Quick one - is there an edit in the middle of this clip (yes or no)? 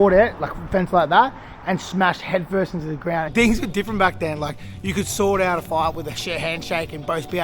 yes